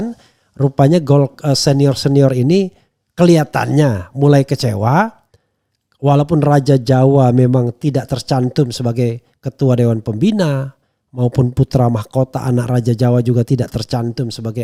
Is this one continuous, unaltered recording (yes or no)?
yes